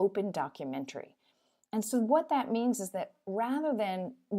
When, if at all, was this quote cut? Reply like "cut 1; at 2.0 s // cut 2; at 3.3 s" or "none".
none